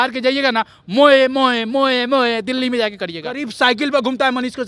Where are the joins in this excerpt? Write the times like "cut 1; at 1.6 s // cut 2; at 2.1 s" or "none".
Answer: cut 1; at 3.4 s